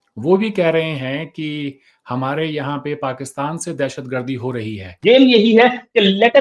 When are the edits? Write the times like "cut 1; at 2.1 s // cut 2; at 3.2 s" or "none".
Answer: cut 1; at 4.9 s